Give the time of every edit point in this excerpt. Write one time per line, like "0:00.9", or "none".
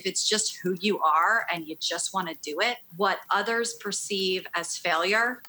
0:02.9